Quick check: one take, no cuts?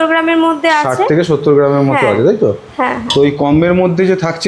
yes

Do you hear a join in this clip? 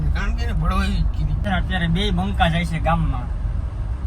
yes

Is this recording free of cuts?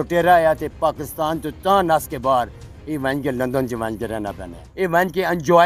no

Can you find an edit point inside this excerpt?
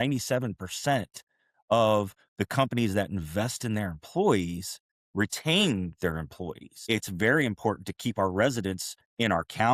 yes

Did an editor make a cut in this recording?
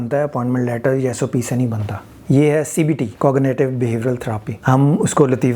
yes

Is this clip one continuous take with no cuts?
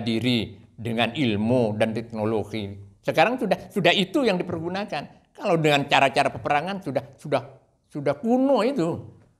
yes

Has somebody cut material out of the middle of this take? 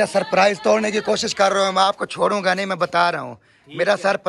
no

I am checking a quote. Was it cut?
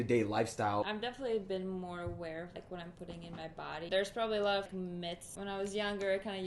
yes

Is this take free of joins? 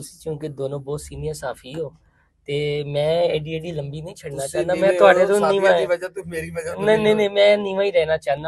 yes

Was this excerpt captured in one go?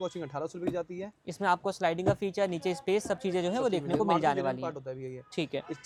yes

